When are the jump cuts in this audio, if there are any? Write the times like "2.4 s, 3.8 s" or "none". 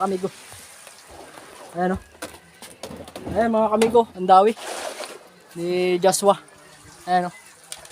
5.5 s